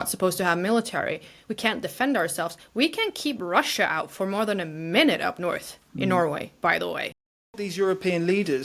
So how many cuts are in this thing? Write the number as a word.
one